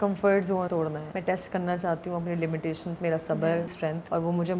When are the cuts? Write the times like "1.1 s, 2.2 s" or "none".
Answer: 0.8 s, 2.9 s, 3.7 s